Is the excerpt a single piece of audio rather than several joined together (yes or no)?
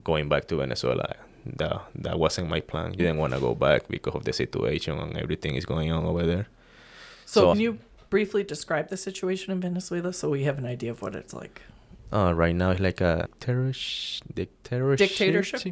yes